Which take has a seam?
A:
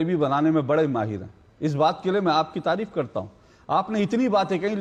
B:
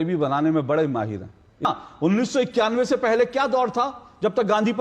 B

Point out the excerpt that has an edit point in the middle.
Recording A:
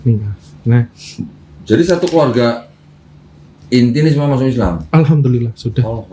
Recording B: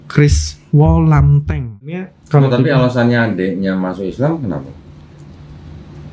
B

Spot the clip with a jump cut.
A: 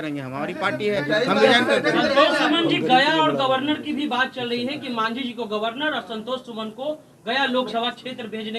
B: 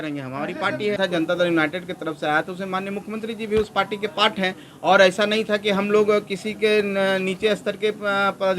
B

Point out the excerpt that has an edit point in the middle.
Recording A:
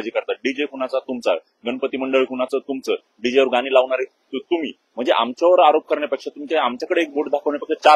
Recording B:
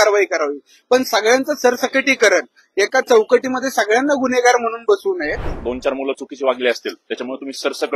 B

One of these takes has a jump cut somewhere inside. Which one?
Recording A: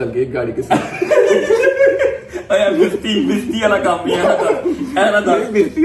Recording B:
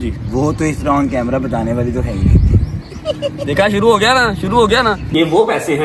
B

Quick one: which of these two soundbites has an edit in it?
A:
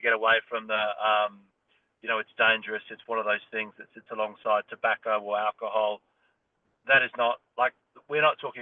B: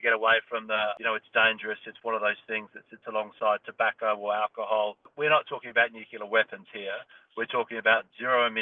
B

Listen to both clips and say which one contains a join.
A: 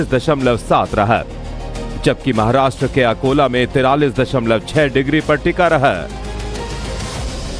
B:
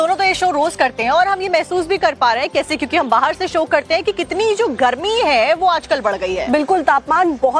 A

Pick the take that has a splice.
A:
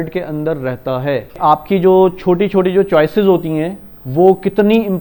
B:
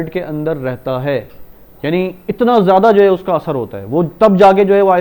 A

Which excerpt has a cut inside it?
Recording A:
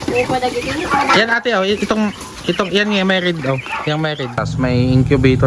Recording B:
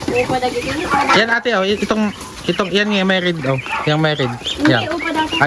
A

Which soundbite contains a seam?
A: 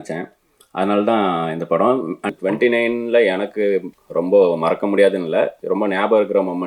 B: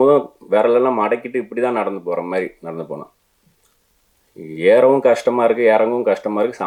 A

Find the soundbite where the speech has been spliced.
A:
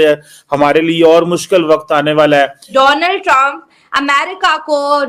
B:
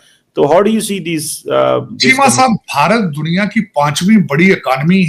A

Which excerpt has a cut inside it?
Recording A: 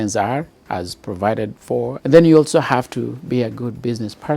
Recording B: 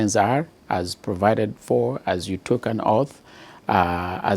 A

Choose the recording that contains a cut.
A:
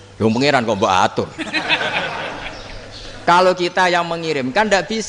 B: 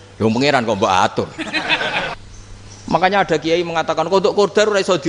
B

